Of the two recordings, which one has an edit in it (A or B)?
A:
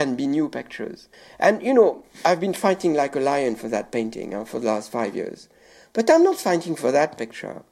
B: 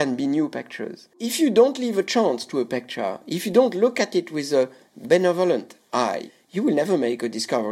B